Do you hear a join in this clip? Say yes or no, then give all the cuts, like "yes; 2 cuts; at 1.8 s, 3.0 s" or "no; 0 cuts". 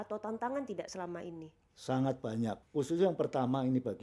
yes; 1 cut; at 2.6 s